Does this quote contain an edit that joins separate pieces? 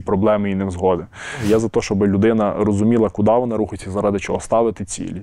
yes; 1 cut; at 1.4 s

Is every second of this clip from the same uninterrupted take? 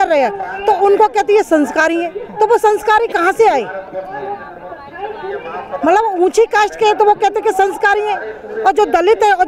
yes; 0 cuts

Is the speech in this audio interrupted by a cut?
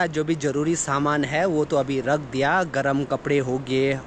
no; 0 cuts

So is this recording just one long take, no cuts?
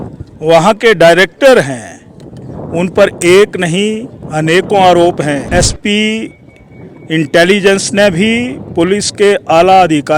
no; 1 cut; at 5.5 s

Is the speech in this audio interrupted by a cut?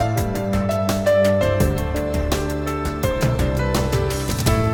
no; 0 cuts

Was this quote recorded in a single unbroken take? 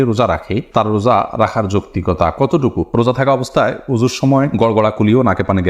no; 1 cut; at 2.8 s

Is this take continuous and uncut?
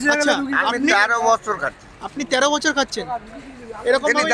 yes; 0 cuts

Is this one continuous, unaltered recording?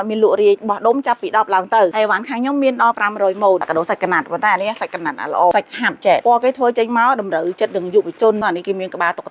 no; 4 cuts; at 1.9 s, 3.6 s, 6.2 s, 8.4 s

